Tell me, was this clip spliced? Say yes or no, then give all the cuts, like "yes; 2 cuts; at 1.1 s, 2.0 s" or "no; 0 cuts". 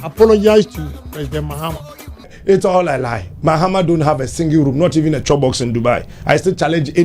yes; 1 cut; at 2.3 s